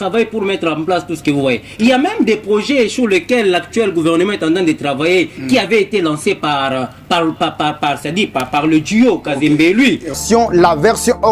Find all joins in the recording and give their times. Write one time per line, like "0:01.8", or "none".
0:10.2

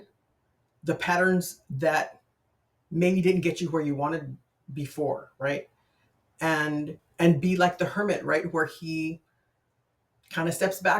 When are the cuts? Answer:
0:07.0

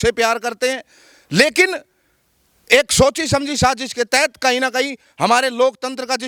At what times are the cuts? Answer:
none

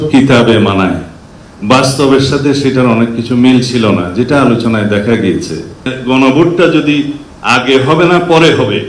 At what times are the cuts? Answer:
0:06.0

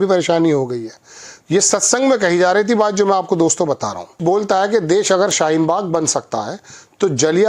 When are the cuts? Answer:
0:04.2

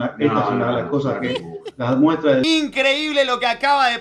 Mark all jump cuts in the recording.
0:02.4

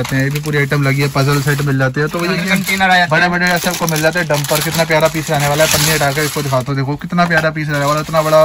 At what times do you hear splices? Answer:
0:02.3

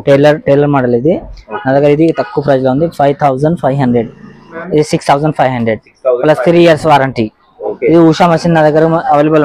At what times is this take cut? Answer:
0:04.5
0:07.6

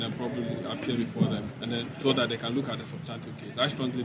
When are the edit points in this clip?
0:01.5

